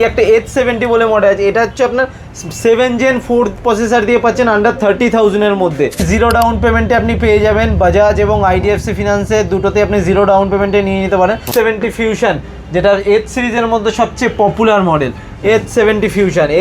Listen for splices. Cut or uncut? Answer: cut